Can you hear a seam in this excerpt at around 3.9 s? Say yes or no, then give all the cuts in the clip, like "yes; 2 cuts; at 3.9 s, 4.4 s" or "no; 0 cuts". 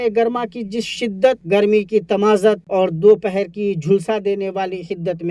no; 2 cuts; at 1.4 s, 2.6 s